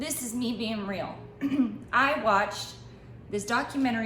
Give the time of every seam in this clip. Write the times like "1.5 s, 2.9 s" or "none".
none